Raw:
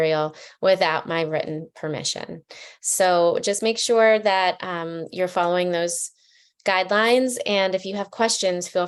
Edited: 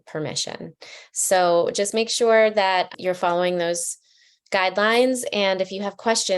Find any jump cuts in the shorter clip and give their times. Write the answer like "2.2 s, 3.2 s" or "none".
2.9 s